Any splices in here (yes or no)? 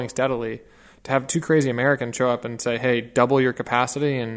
no